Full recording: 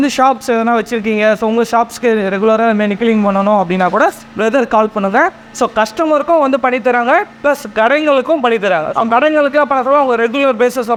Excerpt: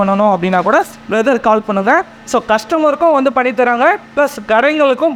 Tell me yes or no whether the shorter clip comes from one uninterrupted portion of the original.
yes